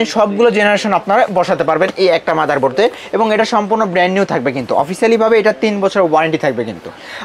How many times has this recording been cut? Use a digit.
0